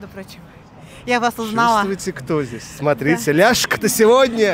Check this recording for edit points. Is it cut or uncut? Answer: uncut